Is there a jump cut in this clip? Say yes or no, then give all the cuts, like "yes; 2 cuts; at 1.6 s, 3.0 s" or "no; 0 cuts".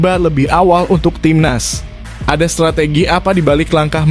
no; 0 cuts